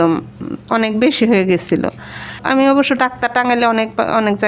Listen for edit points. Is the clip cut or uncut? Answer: cut